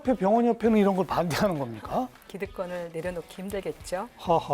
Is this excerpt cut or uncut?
cut